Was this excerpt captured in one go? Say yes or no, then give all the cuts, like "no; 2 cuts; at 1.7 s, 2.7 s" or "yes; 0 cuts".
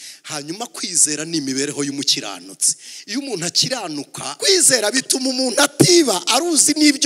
no; 1 cut; at 4.2 s